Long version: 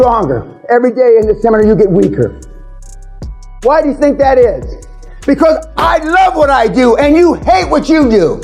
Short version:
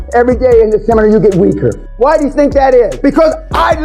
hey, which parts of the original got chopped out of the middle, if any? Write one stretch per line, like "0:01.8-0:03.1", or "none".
0:02.4-0:03.5
0:04.6-0:05.2